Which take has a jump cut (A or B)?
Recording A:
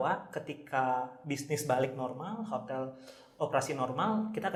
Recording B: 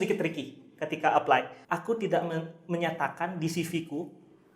B